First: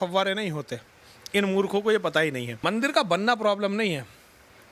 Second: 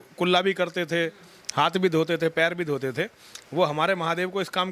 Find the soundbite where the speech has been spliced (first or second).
first